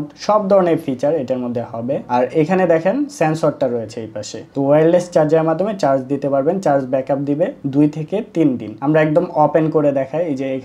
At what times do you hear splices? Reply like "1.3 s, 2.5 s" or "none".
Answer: none